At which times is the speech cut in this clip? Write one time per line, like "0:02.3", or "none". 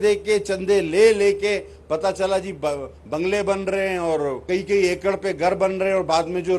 0:04.4